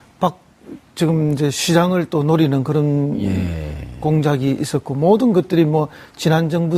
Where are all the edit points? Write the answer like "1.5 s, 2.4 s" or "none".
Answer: 1.1 s

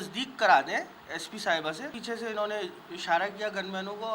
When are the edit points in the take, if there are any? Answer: 2.0 s

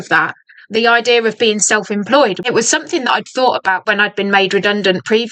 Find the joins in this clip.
2.4 s, 3.8 s

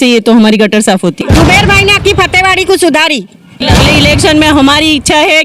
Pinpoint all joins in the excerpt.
1.2 s, 3.6 s

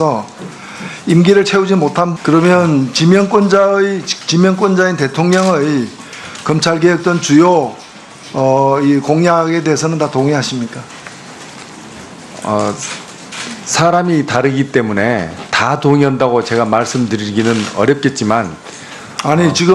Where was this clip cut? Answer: none

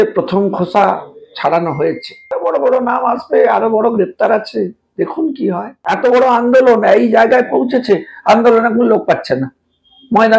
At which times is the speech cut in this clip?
2.4 s, 5.7 s

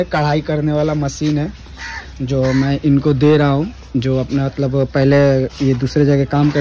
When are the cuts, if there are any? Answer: none

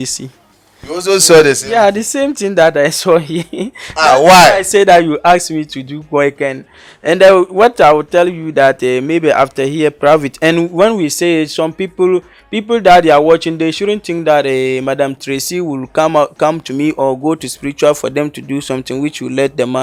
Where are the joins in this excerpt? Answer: none

